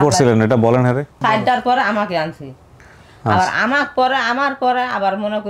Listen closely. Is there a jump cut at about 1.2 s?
yes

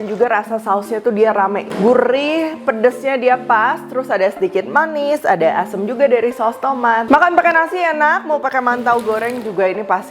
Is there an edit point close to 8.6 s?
no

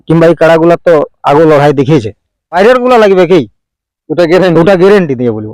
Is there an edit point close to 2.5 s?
yes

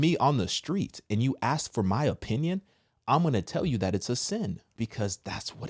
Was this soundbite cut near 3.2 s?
no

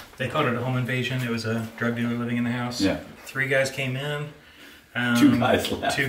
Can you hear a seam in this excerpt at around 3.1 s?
yes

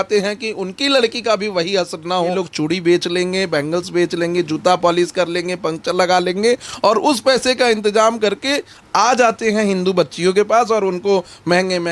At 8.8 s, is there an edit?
yes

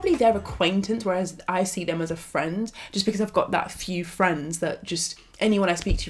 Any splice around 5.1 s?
no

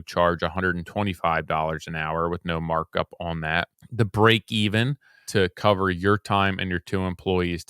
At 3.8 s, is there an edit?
yes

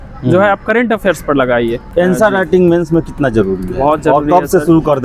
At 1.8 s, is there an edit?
yes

